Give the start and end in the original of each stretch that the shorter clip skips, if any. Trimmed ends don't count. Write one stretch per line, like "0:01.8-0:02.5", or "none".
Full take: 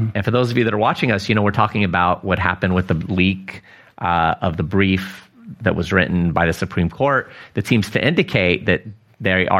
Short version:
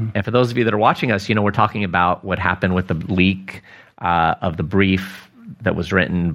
none